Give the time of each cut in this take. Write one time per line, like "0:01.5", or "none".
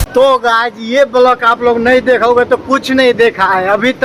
none